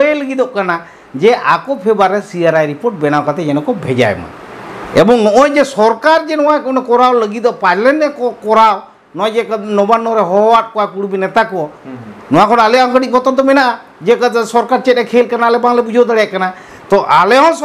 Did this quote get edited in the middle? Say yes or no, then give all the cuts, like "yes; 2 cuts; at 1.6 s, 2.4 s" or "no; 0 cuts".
no; 0 cuts